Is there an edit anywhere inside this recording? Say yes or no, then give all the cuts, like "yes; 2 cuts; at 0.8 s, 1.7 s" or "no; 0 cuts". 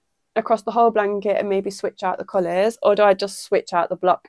no; 0 cuts